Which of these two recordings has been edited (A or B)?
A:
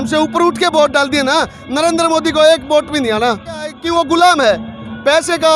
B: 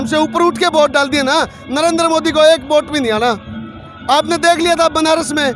A